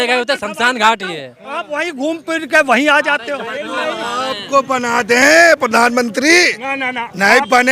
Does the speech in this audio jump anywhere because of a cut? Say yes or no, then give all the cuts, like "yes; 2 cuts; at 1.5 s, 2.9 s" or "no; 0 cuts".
no; 0 cuts